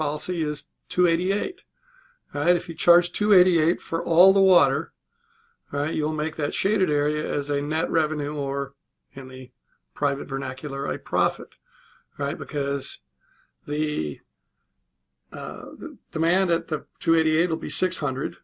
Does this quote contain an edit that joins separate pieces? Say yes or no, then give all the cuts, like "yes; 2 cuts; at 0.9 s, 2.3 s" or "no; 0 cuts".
yes; 1 cut; at 9.6 s